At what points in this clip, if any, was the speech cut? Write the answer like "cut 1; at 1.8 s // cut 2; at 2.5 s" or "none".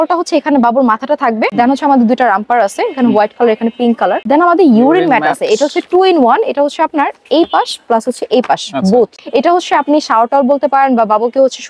cut 1; at 1.5 s // cut 2; at 4.2 s // cut 3; at 9.2 s